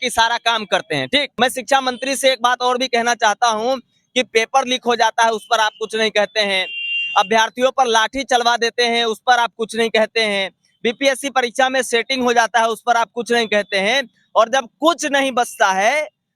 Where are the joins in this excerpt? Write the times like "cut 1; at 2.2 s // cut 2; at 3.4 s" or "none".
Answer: cut 1; at 1.3 s